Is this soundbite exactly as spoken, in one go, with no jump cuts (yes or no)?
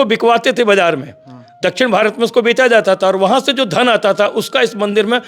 yes